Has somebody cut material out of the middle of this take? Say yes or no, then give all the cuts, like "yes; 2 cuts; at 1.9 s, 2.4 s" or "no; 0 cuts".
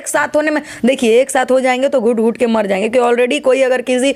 no; 0 cuts